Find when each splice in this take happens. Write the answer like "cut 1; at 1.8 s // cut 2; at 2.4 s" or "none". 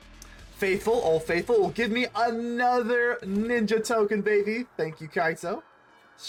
none